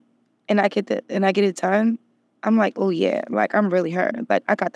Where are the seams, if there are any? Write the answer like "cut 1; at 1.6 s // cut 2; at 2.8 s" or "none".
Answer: none